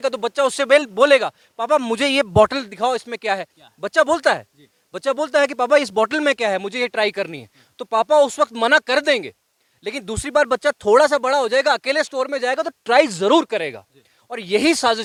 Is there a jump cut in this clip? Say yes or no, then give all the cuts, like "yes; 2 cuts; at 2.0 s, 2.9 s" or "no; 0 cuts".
no; 0 cuts